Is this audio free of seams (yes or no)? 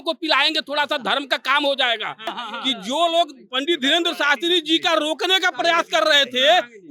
no